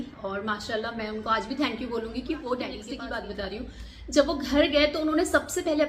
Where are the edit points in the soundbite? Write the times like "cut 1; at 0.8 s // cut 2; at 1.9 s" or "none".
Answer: cut 1; at 2.9 s